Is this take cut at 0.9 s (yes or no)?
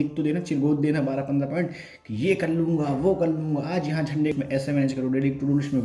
no